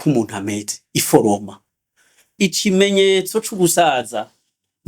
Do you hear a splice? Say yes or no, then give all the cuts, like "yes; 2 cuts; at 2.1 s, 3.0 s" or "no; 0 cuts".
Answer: yes; 1 cut; at 2.3 s